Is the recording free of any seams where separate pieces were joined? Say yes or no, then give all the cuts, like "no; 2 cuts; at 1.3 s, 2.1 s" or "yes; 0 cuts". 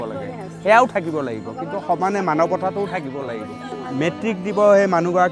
no; 1 cut; at 3.7 s